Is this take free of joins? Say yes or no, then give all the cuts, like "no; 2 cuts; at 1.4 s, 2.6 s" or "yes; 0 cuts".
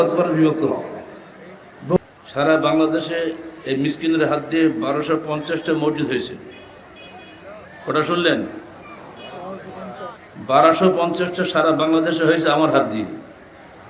no; 1 cut; at 2.0 s